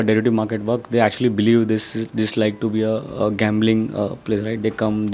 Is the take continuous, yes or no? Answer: yes